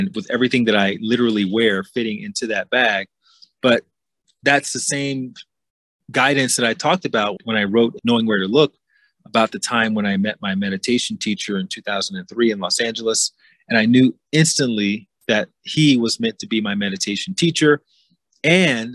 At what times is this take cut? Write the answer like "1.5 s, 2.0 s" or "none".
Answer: 7.8 s